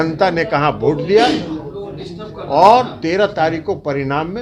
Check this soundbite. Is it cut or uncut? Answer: uncut